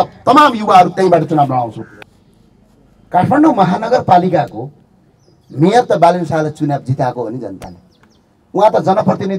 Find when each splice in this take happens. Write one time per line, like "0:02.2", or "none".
0:01.8